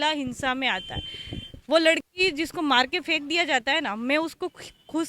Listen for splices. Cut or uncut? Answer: uncut